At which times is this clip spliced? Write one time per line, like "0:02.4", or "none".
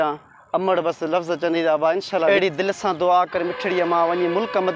0:02.3